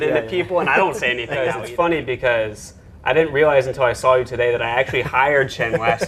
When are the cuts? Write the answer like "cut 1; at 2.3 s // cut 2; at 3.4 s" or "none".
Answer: cut 1; at 1.6 s